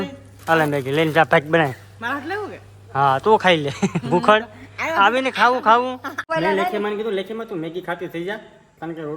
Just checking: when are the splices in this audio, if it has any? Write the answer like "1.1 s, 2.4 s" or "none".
1.9 s, 6.2 s